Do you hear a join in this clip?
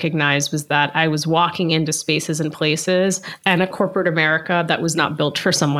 no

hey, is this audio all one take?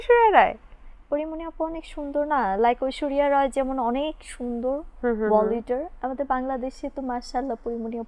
yes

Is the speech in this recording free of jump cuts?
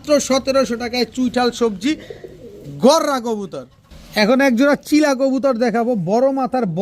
yes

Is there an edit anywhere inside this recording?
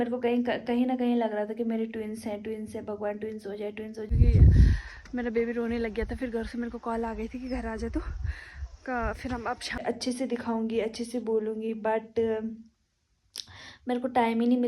yes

